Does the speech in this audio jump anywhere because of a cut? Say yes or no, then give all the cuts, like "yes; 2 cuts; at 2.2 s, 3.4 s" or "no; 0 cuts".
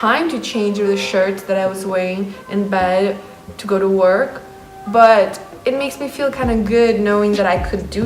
no; 0 cuts